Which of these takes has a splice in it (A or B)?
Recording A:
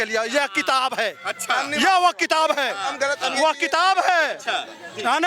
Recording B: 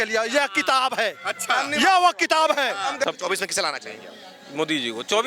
B